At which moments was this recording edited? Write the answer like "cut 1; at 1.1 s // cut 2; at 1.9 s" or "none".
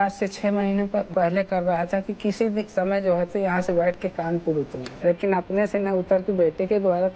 cut 1; at 1.1 s // cut 2; at 4.8 s